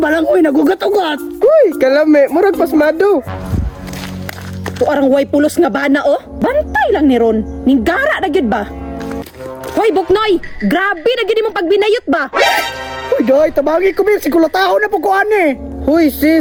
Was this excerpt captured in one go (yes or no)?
yes